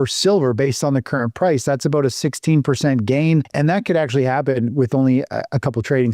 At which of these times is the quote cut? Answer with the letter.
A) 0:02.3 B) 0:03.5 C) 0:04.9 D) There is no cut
B